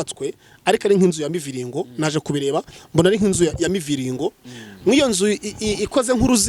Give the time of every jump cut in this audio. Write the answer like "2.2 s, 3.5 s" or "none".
none